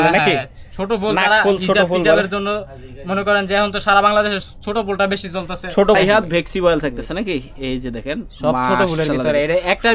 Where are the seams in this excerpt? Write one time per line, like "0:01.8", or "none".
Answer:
0:06.0